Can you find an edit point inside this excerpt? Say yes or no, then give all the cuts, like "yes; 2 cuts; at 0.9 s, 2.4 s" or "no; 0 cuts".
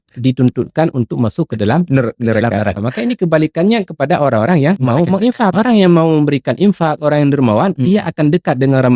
yes; 2 cuts; at 2.8 s, 5.1 s